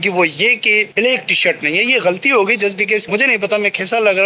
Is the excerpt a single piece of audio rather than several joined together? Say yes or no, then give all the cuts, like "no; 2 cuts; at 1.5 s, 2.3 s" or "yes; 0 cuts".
no; 1 cut; at 3.1 s